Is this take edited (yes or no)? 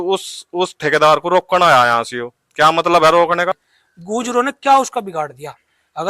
yes